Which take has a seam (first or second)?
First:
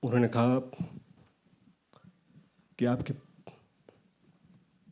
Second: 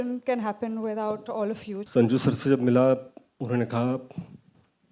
second